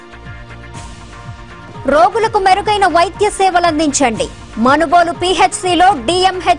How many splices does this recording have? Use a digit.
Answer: 1